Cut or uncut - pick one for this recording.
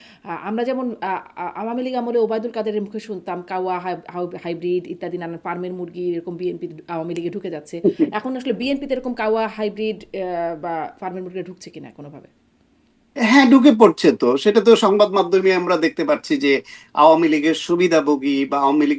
uncut